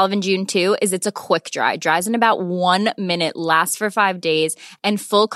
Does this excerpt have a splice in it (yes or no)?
no